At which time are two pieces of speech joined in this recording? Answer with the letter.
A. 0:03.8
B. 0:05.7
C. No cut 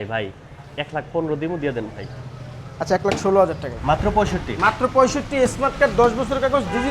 A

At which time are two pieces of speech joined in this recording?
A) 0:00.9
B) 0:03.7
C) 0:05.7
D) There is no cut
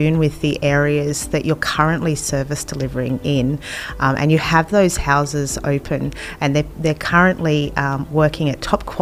D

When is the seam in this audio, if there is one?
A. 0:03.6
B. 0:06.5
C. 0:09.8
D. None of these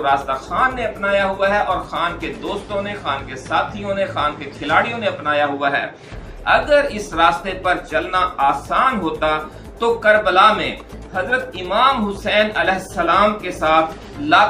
D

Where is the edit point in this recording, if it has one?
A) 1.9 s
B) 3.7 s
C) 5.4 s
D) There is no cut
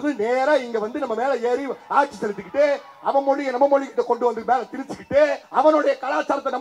C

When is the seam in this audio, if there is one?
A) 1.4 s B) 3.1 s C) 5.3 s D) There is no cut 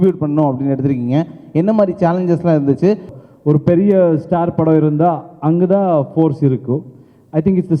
B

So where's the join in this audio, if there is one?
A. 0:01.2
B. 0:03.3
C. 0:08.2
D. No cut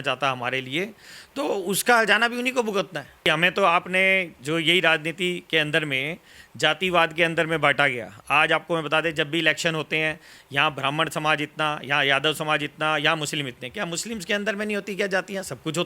B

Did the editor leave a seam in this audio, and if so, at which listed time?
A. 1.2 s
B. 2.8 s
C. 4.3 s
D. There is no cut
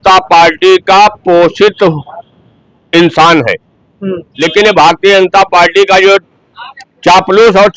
C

